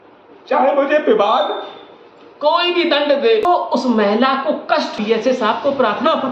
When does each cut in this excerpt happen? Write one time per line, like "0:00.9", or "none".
0:03.5
0:05.0